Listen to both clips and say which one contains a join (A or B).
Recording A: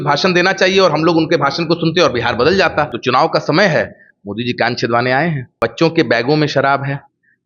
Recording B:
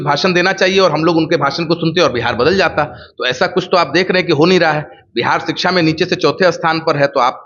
A